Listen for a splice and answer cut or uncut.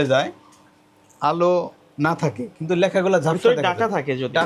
uncut